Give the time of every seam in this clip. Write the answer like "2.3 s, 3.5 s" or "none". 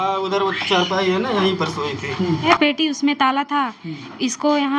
2.4 s